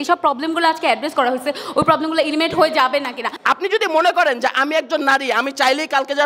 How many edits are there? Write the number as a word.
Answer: one